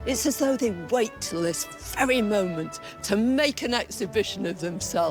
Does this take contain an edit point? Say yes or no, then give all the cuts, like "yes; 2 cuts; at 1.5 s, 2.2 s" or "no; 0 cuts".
no; 0 cuts